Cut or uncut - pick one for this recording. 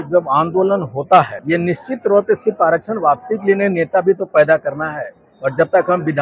cut